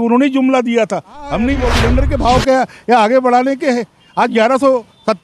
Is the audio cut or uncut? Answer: cut